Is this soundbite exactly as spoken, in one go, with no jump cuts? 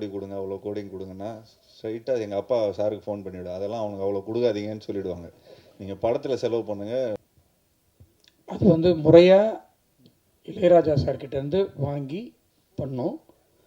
no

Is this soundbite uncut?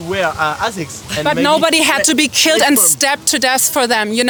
yes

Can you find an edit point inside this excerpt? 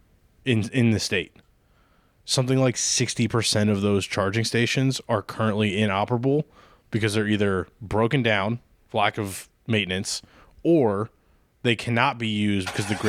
no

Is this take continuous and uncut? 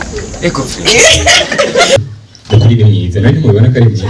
no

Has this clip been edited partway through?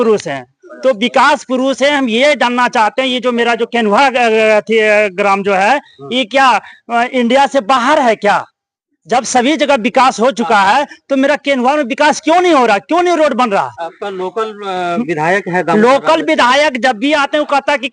no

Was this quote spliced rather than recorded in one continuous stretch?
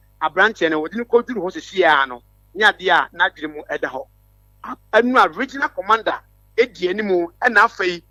no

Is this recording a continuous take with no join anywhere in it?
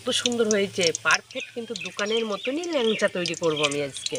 yes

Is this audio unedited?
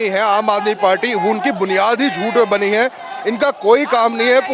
yes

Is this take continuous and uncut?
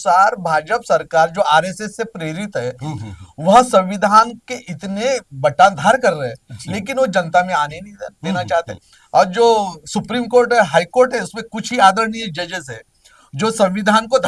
yes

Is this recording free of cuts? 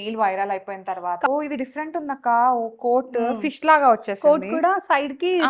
no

